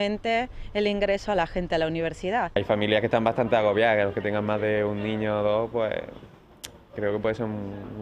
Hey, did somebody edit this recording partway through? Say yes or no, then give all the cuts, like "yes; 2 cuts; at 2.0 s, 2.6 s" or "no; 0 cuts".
no; 0 cuts